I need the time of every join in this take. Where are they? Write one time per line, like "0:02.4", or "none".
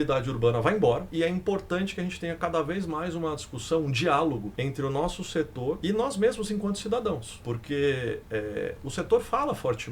none

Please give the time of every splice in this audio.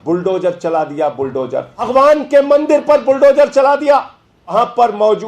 0:01.8
0:04.5

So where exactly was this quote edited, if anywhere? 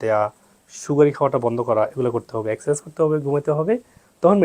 none

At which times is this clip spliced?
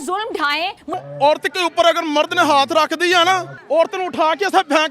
0:00.9
0:03.5

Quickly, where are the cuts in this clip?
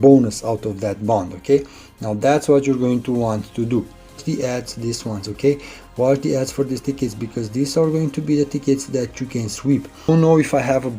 0:04.2
0:10.1

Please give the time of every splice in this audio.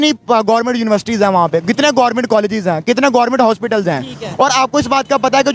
none

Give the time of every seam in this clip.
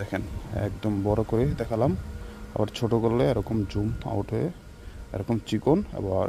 none

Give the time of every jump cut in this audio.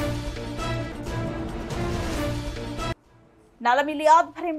none

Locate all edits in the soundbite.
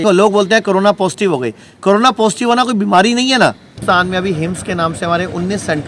0:03.7

